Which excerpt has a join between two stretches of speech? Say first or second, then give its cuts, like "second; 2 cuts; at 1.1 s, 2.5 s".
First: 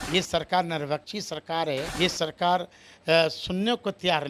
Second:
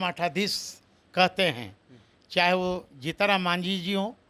first; 1 cut; at 1.9 s